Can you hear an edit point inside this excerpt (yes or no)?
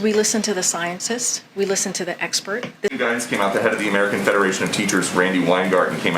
yes